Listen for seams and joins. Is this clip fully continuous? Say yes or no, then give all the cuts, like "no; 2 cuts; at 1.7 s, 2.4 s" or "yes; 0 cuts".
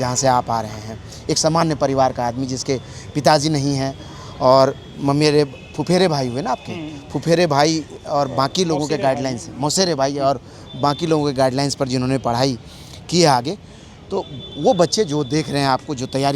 yes; 0 cuts